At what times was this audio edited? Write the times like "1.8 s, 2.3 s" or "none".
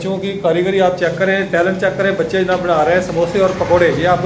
none